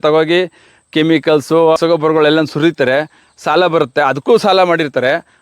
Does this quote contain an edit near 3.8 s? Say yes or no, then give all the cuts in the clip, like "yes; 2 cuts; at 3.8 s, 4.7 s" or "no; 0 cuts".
no; 1 cut; at 1.8 s